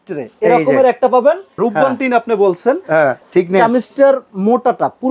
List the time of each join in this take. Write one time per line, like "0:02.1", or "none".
0:01.6
0:03.2